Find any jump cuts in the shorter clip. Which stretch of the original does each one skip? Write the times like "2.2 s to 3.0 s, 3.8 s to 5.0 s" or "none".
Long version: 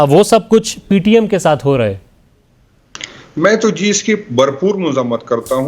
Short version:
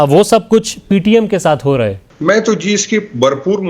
2.1 s to 3.2 s